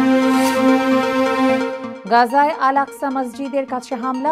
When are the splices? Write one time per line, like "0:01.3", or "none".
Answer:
none